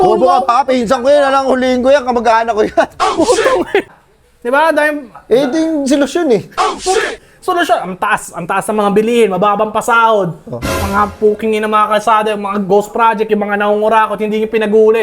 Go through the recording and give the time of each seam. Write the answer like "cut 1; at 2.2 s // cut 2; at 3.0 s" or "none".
cut 1; at 3.9 s